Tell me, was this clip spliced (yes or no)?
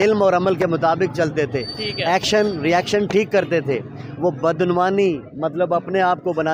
no